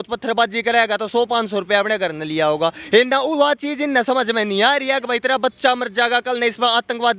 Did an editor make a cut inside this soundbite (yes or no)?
no